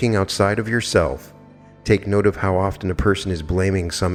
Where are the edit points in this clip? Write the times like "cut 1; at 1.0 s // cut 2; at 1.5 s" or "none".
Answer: none